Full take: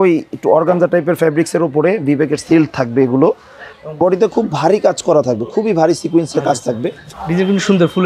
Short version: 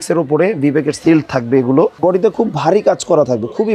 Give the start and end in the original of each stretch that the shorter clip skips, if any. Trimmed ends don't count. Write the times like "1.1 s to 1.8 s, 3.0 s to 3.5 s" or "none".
3.4 s to 3.9 s